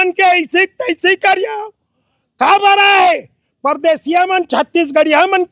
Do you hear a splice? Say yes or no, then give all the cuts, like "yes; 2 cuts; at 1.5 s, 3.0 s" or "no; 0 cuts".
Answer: no; 0 cuts